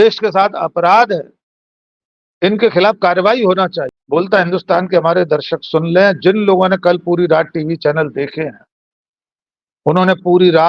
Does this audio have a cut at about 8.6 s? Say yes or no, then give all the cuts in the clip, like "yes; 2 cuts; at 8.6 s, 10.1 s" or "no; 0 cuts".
no; 1 cut; at 3.9 s